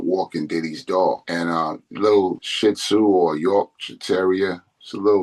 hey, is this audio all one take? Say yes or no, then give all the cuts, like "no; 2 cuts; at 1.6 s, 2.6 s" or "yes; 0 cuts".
yes; 0 cuts